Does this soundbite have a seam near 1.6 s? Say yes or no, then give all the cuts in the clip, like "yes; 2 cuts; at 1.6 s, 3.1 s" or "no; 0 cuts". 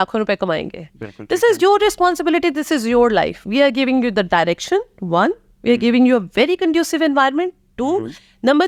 no; 0 cuts